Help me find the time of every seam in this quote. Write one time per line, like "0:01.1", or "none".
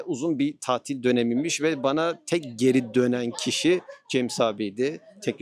none